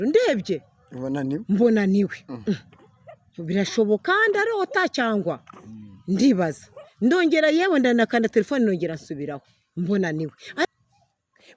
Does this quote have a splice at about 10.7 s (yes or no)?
yes